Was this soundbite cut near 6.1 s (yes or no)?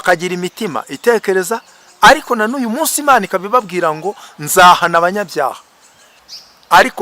yes